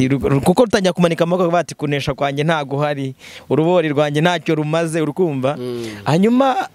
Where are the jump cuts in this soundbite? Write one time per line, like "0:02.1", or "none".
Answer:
none